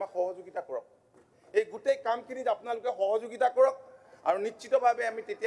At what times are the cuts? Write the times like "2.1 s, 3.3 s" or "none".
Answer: none